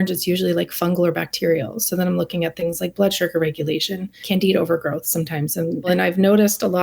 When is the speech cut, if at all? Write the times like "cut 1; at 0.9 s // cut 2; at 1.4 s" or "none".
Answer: cut 1; at 4.2 s // cut 2; at 5.9 s